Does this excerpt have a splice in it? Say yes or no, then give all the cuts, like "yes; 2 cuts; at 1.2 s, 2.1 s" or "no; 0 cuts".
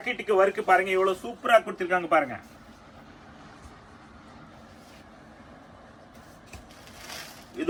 no; 0 cuts